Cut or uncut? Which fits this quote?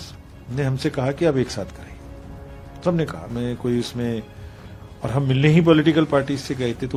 uncut